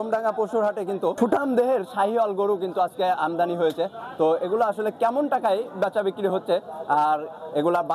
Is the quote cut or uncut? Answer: cut